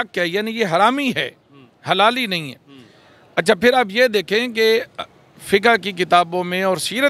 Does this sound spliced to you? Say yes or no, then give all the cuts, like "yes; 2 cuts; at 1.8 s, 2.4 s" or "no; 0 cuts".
no; 0 cuts